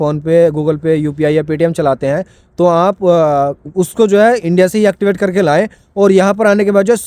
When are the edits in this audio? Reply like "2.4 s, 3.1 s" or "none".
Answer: none

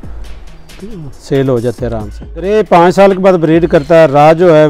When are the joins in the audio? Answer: 2.5 s

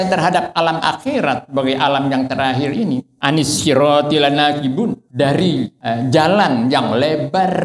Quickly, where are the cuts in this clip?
3.1 s, 5.0 s, 5.8 s

